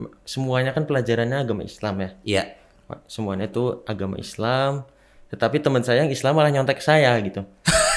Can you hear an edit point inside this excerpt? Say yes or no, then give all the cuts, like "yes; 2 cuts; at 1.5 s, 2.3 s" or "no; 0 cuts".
no; 0 cuts